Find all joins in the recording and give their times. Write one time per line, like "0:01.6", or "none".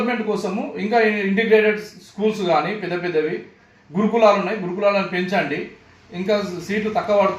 none